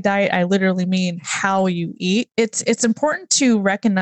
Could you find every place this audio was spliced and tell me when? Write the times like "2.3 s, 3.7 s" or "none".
2.3 s